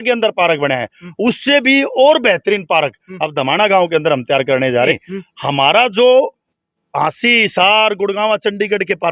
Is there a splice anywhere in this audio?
yes; 1 cut; at 4.9 s

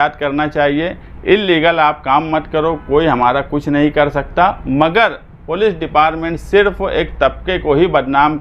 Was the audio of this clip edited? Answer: no; 0 cuts

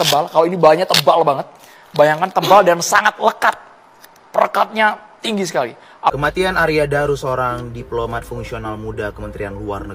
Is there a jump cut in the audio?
yes; 1 cut; at 6.1 s

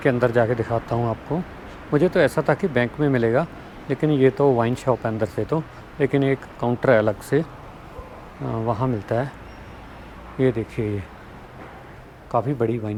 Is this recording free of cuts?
yes; 0 cuts

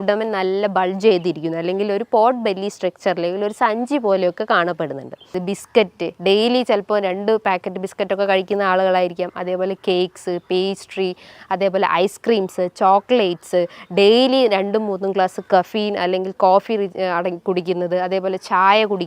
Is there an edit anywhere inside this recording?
yes; 1 cut; at 5.4 s

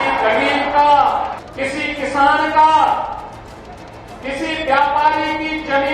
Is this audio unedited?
no; 1 cut; at 1.4 s

